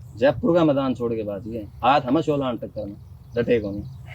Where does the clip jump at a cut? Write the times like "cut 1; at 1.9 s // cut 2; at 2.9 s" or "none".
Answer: none

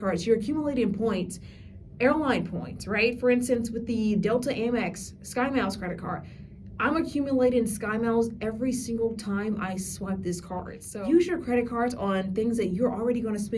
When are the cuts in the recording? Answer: cut 1; at 10.8 s

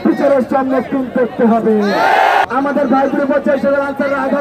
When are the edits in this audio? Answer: cut 1; at 2.4 s

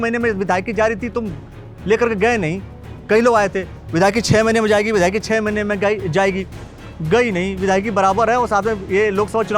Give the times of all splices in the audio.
none

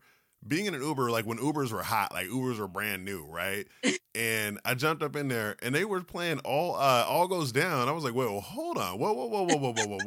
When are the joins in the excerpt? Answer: none

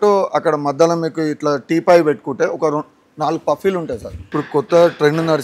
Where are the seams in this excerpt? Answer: cut 1; at 4.2 s

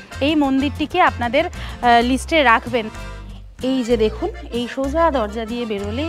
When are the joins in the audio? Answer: cut 1; at 2.9 s

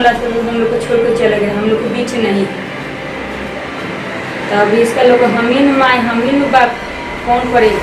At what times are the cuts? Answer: none

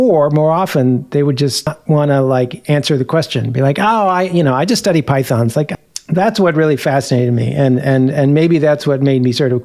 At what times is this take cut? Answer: cut 1; at 1.8 s // cut 2; at 5.7 s

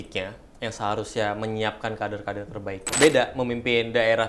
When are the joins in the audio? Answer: cut 1; at 2.9 s

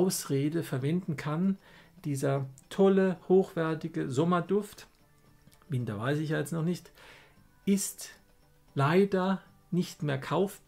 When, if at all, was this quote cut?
none

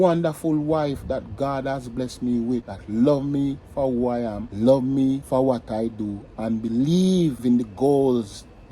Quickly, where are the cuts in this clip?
cut 1; at 2.8 s // cut 2; at 4.4 s // cut 3; at 5.2 s // cut 4; at 7.4 s

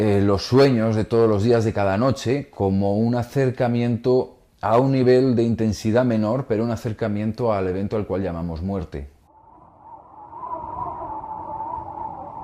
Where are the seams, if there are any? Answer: cut 1; at 6.4 s

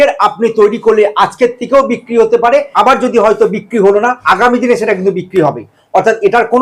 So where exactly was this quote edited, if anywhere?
cut 1; at 2.7 s // cut 2; at 4.2 s

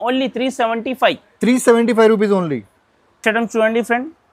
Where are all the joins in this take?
none

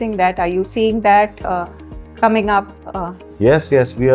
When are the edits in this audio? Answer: none

